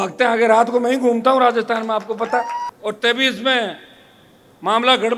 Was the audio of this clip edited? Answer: yes; 1 cut; at 2.6 s

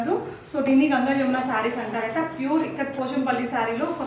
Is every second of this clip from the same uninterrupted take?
yes; 0 cuts

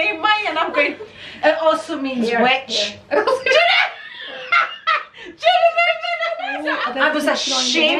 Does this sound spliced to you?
yes; 1 cut; at 6.8 s

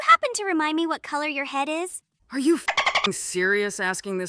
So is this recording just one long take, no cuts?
yes; 0 cuts

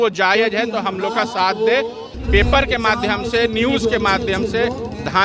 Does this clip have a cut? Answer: yes; 1 cut; at 2.0 s

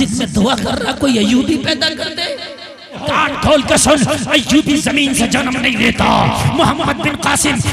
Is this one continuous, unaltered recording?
no; 1 cut; at 3.0 s

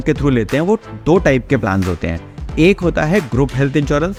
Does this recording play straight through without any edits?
yes; 0 cuts

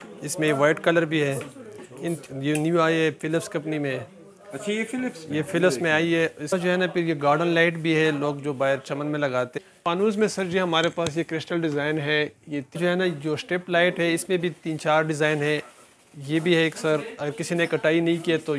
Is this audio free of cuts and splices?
no; 4 cuts; at 2.2 s, 6.5 s, 9.5 s, 12.8 s

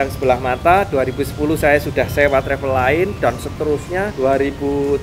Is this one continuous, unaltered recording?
yes; 0 cuts

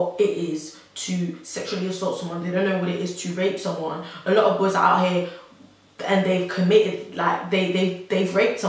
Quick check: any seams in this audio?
no; 0 cuts

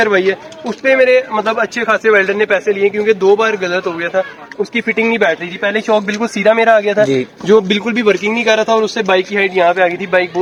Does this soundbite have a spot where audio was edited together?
no; 0 cuts

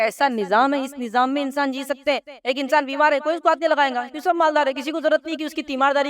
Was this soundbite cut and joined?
yes; 1 cut; at 2.3 s

